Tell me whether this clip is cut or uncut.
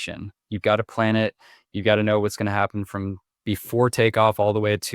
cut